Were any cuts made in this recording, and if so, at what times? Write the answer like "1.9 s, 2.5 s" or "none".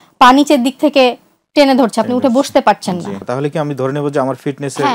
3.2 s

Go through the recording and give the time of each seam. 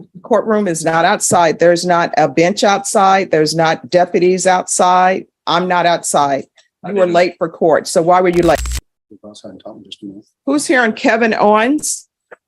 8.6 s

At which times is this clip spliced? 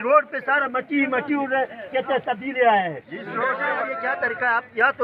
3.9 s

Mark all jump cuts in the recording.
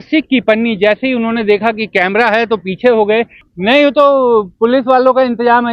3.4 s

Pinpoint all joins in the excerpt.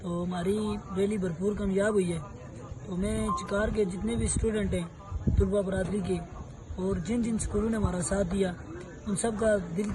none

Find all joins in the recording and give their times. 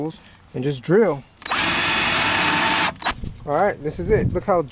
3.1 s

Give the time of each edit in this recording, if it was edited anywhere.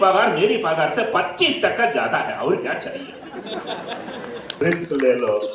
4.6 s

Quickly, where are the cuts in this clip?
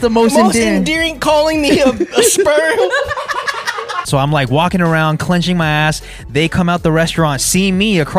3.9 s

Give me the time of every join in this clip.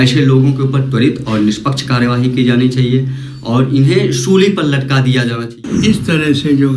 5.6 s

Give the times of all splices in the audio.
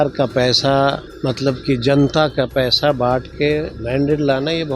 1.1 s

